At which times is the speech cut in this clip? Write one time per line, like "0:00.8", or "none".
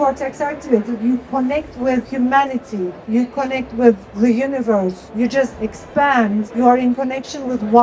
0:02.1
0:03.0
0:05.0
0:06.5